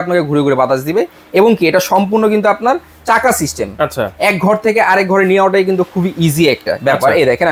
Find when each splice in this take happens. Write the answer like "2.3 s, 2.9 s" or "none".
none